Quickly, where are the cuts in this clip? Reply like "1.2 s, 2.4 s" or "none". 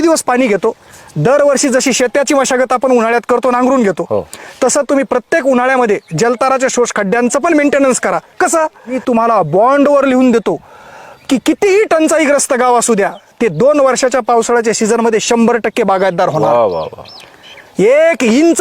9.0 s